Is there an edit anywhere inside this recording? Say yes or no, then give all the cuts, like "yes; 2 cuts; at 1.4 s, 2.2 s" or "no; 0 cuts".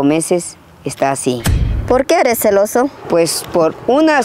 yes; 1 cut; at 1.9 s